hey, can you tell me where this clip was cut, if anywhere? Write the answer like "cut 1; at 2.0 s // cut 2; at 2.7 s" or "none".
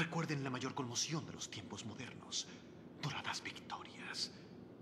cut 1; at 1.7 s